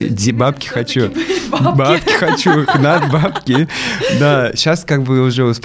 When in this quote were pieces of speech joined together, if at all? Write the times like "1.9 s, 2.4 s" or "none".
none